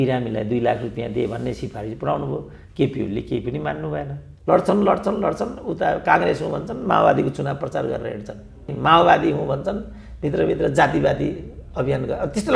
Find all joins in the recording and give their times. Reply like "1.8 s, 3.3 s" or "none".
4.2 s, 8.7 s